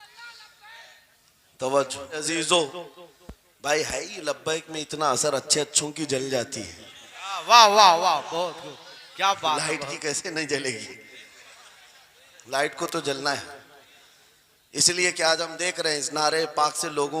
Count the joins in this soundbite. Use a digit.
1